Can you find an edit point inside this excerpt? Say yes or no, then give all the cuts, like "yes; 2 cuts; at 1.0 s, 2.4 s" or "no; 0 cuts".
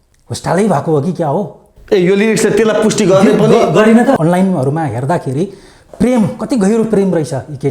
yes; 1 cut; at 4.2 s